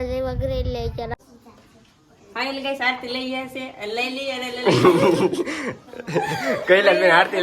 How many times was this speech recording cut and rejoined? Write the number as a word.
one